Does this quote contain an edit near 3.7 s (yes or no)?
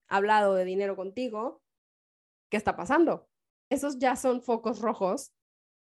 yes